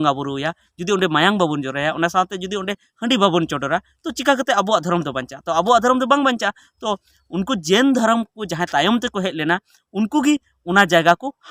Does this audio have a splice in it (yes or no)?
no